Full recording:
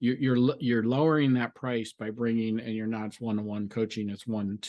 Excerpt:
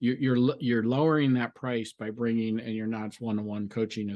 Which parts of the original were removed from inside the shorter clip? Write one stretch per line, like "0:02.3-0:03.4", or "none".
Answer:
none